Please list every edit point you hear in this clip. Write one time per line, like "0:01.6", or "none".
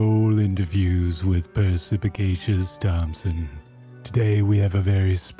0:03.6